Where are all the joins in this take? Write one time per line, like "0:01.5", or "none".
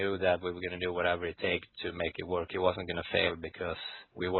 none